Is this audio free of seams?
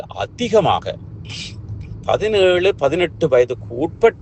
yes; 0 cuts

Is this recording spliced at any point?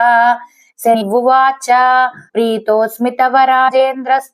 yes; 3 cuts; at 1.0 s, 2.2 s, 3.7 s

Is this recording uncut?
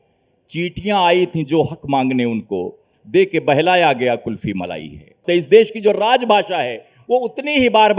no; 1 cut; at 5.2 s

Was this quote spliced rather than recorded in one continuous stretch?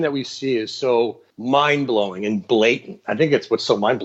yes; 1 cut; at 1.3 s

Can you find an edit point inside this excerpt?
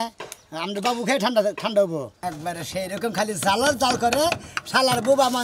yes; 1 cut; at 2.1 s

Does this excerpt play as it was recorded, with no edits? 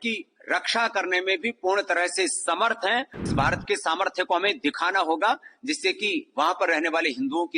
no; 1 cut; at 3.3 s

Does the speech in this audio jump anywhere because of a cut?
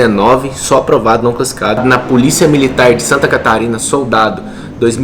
yes; 1 cut; at 1.8 s

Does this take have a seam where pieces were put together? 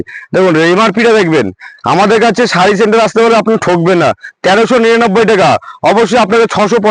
no; 0 cuts

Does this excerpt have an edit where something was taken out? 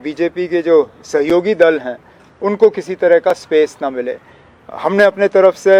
no; 0 cuts

